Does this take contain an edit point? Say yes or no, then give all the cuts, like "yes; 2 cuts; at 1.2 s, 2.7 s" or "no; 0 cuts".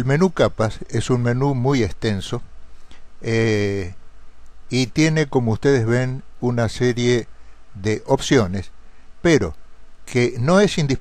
no; 0 cuts